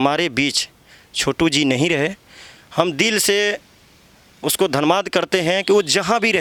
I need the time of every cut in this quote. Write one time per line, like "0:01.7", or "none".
none